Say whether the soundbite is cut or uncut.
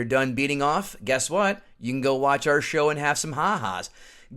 uncut